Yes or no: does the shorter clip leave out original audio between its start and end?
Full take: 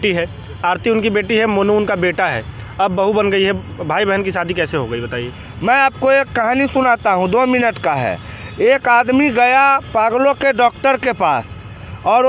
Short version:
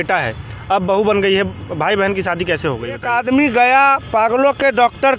yes